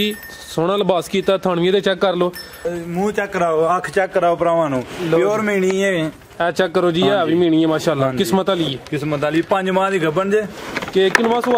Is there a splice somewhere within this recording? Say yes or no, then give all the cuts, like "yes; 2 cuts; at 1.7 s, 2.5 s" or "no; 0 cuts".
yes; 1 cut; at 2.6 s